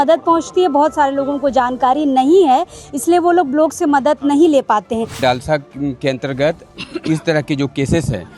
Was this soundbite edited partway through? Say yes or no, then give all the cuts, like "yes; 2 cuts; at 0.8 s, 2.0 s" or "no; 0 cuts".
yes; 1 cut; at 5.2 s